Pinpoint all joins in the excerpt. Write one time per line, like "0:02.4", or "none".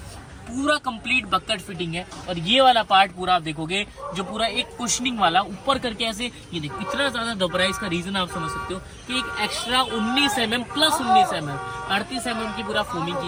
none